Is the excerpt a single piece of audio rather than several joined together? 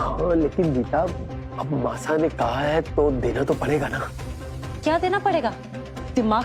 yes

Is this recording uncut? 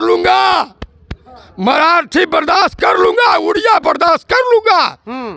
yes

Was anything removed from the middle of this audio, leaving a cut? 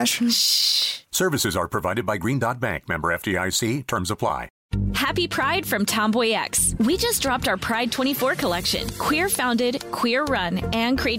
yes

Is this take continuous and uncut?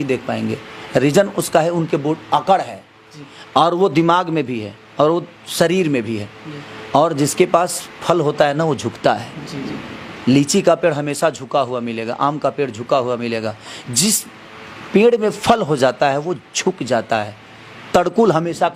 yes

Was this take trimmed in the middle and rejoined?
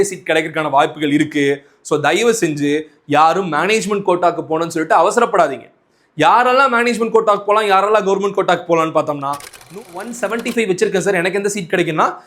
yes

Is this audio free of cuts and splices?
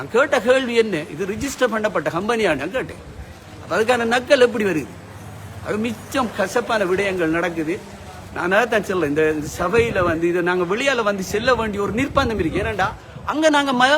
yes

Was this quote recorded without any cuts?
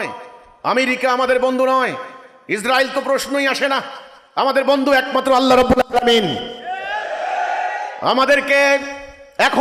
yes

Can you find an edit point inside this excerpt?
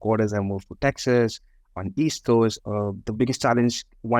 yes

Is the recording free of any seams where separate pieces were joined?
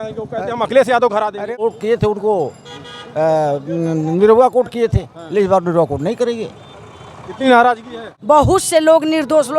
no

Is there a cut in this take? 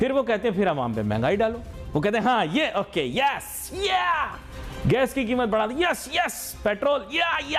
no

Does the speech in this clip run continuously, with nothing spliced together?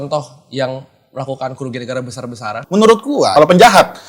no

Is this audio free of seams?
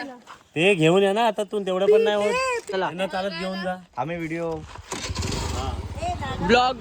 no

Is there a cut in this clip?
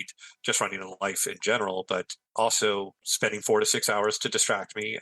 yes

